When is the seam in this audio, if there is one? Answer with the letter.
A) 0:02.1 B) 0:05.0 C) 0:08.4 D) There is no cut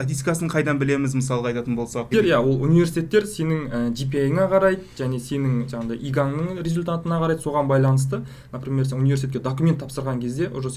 A